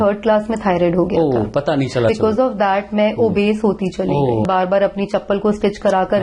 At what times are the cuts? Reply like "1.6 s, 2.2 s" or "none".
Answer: 2.1 s, 4.5 s

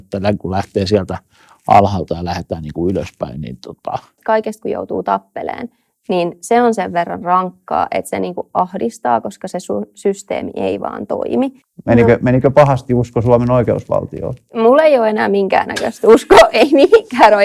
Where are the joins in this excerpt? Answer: 4.1 s, 11.7 s

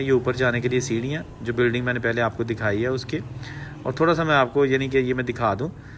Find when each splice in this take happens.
none

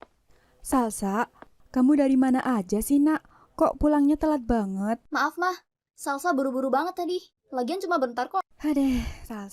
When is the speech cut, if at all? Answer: 5.1 s, 7.4 s

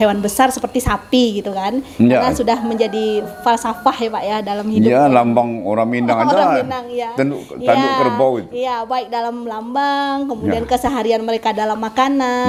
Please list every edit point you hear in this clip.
none

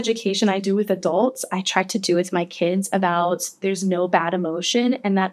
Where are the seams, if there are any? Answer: none

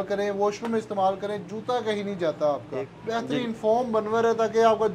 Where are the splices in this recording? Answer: 2.6 s

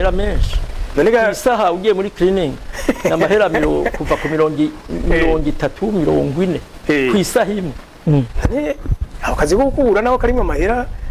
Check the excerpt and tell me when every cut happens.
7.9 s

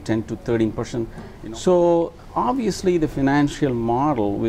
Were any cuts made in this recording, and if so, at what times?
1.2 s

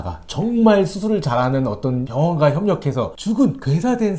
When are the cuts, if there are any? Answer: 2.1 s, 3.2 s

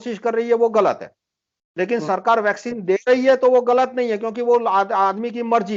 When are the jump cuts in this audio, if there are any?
none

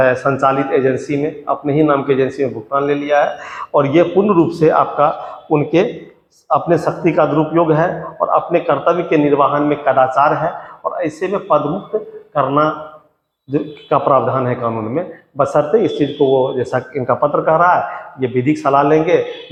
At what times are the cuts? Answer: none

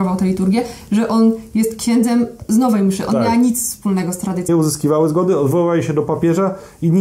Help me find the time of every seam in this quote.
4.5 s

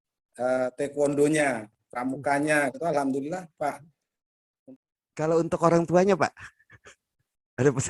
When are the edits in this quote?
4.6 s

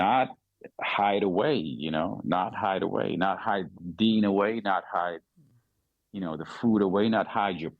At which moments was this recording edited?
none

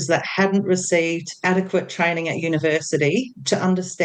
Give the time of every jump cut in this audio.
1.3 s

